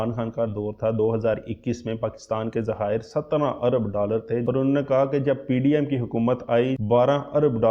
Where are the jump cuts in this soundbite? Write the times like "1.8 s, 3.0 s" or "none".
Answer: 4.4 s, 6.8 s